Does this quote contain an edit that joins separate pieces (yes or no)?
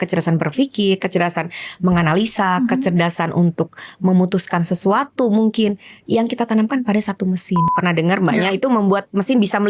yes